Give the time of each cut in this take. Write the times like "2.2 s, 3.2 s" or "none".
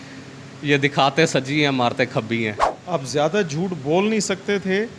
2.7 s